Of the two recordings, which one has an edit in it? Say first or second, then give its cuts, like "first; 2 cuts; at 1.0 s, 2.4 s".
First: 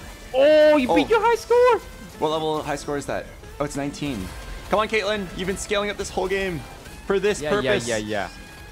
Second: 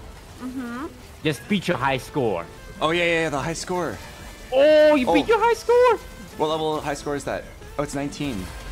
second; 2 cuts; at 1.1 s, 2.6 s